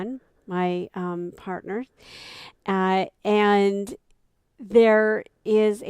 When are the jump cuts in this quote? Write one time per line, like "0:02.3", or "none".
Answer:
0:02.0